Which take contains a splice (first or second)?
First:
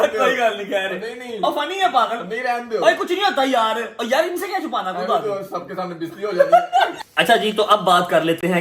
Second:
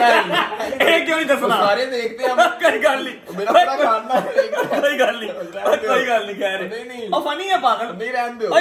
first